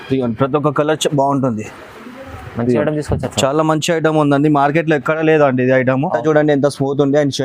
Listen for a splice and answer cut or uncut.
cut